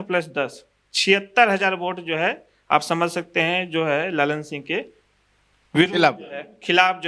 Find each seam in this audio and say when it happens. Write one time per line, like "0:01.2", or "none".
none